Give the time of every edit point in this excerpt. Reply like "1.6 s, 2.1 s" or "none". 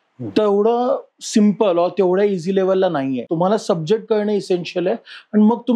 3.3 s